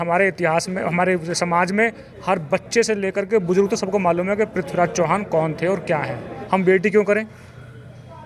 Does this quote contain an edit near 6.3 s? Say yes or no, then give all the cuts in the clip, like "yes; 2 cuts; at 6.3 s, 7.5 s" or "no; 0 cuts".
yes; 1 cut; at 6.3 s